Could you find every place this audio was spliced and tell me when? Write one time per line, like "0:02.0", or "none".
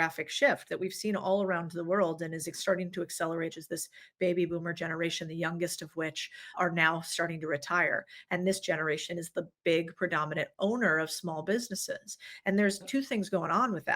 0:03.6
0:06.6